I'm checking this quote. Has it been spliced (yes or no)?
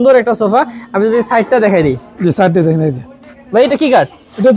no